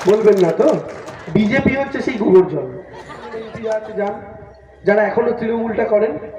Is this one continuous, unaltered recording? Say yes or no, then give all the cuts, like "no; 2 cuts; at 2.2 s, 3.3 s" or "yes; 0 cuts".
no; 1 cut; at 3.4 s